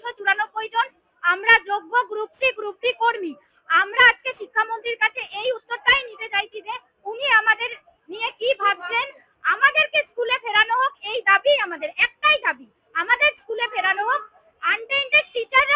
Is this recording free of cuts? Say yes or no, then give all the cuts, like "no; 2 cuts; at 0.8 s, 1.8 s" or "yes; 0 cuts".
yes; 0 cuts